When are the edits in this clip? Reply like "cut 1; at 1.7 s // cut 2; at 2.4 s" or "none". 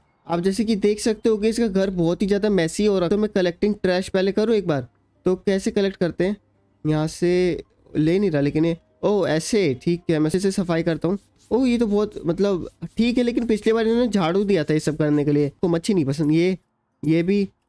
cut 1; at 3.1 s // cut 2; at 10.3 s // cut 3; at 15.6 s